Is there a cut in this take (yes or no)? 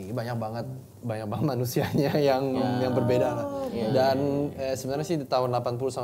no